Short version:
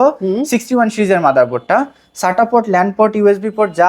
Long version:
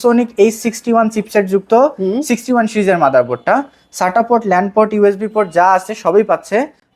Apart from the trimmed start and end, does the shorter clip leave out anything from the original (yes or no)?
no